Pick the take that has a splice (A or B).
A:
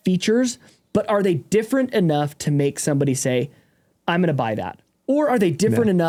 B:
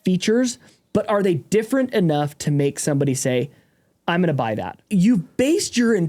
B